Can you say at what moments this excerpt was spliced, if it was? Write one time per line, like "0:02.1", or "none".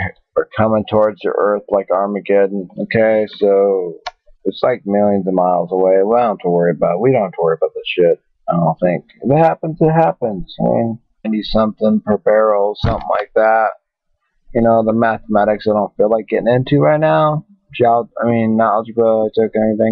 none